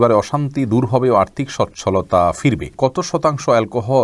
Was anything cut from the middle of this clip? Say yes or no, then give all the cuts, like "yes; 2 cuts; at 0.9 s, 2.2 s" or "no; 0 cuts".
yes; 1 cut; at 2.7 s